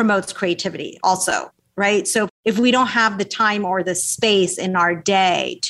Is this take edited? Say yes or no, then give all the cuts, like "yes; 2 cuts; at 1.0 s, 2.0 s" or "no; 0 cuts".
no; 0 cuts